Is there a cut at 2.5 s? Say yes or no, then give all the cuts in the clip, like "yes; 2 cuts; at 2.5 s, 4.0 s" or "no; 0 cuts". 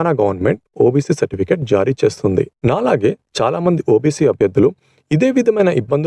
yes; 1 cut; at 2.5 s